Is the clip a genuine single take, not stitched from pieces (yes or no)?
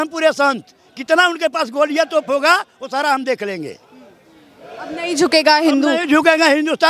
yes